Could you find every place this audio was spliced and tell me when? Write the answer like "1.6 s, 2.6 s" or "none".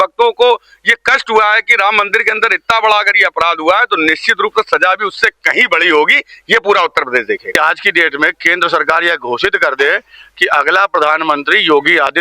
7.5 s